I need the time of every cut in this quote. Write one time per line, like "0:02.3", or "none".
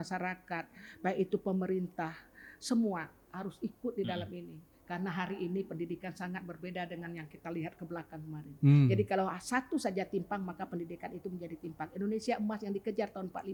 none